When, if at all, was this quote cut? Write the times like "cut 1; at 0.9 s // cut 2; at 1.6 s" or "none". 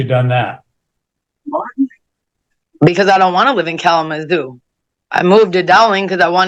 none